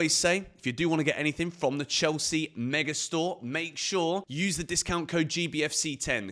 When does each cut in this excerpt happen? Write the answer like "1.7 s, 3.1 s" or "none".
4.3 s